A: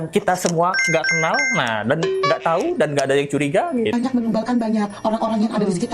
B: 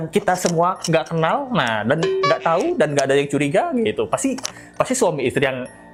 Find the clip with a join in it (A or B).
A